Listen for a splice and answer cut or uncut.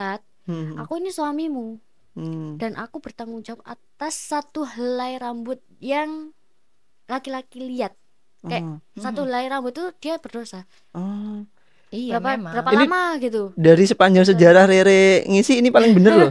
uncut